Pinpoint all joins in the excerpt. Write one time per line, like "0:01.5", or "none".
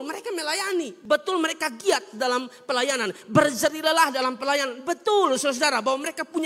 0:00.9